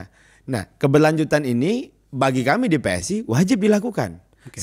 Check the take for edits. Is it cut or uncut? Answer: uncut